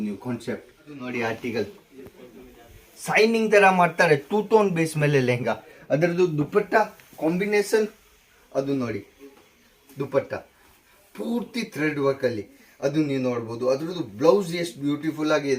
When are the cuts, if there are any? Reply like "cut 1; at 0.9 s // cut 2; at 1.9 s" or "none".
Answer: cut 1; at 1.0 s